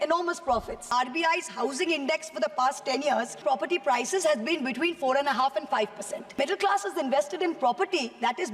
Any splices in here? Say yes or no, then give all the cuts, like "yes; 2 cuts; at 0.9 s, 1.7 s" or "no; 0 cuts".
yes; 3 cuts; at 0.8 s, 3.3 s, 6.3 s